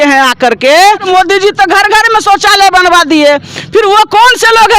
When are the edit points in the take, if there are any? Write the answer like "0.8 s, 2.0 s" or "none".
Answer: 1.0 s